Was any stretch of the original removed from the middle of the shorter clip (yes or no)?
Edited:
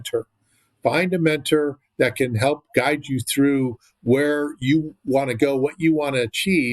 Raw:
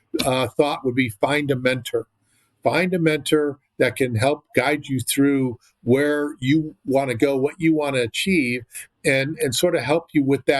no